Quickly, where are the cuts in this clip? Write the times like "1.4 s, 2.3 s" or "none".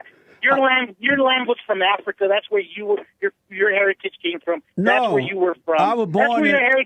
none

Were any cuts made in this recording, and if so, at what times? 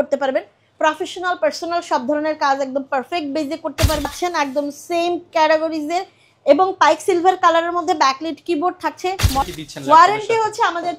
4.1 s, 9.5 s

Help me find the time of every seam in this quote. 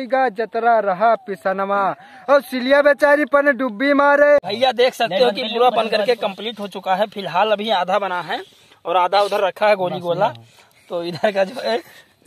4.5 s

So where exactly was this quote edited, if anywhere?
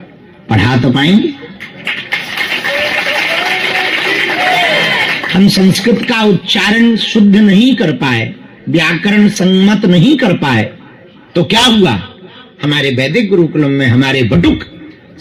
none

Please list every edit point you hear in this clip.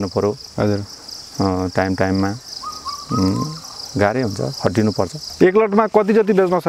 5.2 s

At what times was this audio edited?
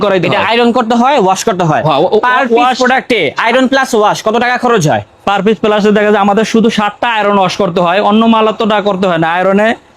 none

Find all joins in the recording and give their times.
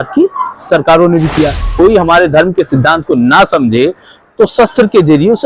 1.7 s

